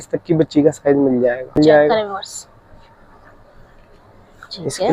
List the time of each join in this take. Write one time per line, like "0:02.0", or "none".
0:01.6